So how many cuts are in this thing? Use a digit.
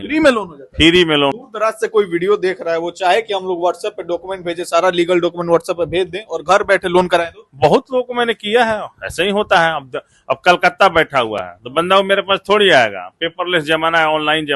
1